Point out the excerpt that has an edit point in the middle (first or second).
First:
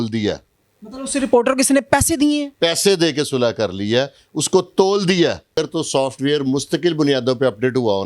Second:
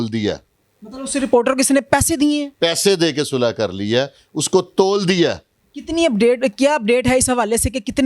first